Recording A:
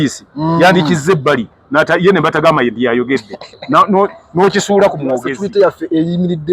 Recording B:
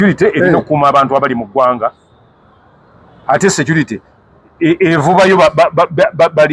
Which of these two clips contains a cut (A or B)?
A